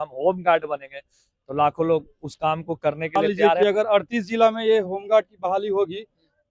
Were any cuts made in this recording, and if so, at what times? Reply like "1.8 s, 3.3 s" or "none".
3.4 s